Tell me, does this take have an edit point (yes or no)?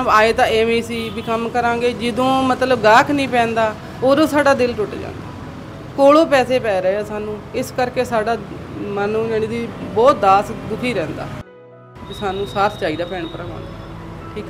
yes